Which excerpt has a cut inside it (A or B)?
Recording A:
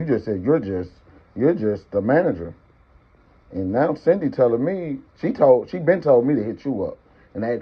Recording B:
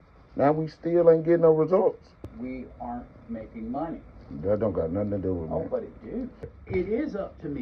B